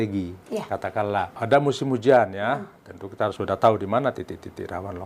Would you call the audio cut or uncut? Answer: cut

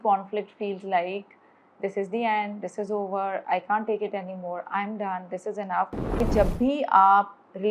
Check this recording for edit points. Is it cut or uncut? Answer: cut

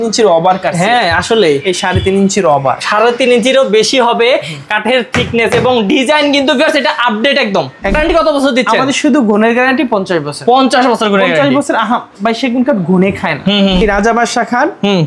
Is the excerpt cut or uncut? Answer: cut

